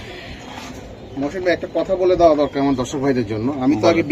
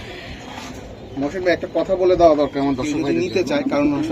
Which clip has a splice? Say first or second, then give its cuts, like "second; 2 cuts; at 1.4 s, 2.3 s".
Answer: second; 1 cut; at 2.9 s